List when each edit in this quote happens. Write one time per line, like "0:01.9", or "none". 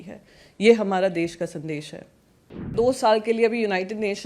0:02.7